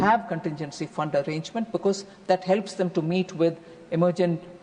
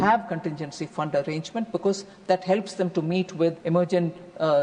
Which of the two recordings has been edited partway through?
second; 1 cut; at 3.6 s

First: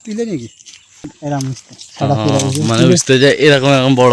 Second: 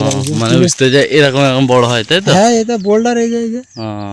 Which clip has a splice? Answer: first; 1 cut; at 1.1 s

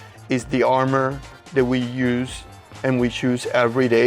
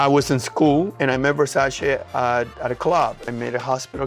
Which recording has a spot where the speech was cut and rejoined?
second; 2 cuts; at 0.9 s, 3.3 s

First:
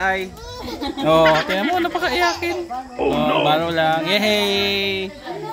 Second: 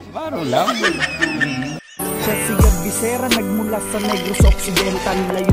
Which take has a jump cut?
second; 1 cut; at 2.1 s

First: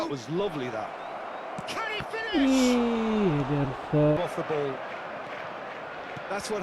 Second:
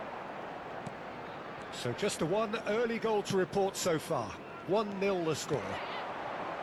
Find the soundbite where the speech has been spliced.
first; 1 cut; at 4.2 s

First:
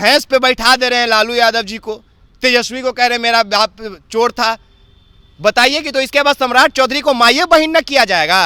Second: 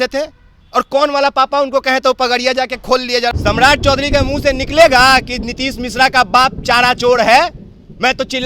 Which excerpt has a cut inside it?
second; 1 cut; at 3.3 s

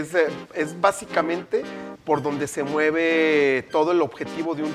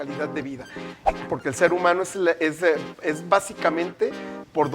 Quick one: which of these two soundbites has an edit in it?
second; 1 cut; at 1.1 s

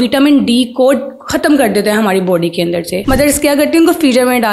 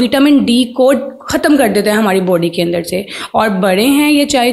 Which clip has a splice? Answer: first; 1 cut; at 2.9 s

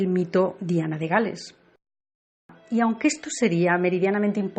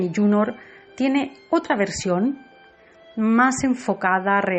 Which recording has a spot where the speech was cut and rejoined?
second; 1 cut; at 3.4 s

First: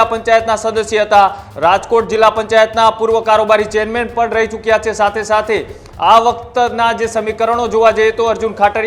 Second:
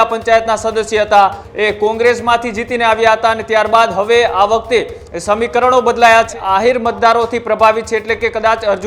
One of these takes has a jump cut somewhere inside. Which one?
second; 2 cuts; at 1.4 s, 6.3 s

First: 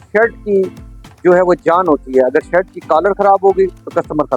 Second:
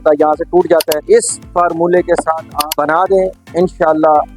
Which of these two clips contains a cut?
second; 2 cuts; at 0.9 s, 2.6 s

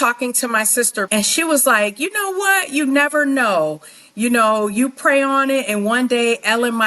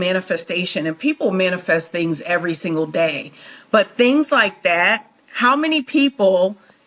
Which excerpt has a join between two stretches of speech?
first; 1 cut; at 1.1 s

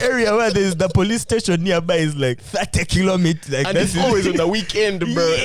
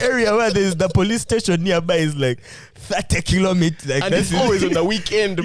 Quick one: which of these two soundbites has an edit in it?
first; 1 cut; at 2.4 s

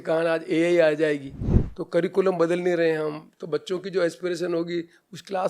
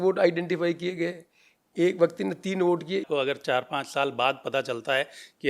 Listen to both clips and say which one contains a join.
second; 1 cut; at 3.0 s

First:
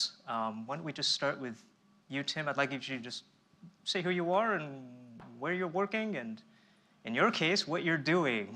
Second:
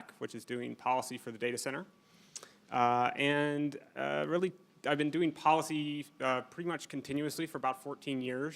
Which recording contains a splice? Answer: second; 1 cut; at 1.5 s

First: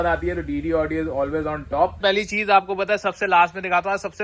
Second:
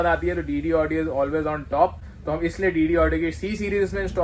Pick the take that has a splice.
first; 1 cut; at 2.0 s

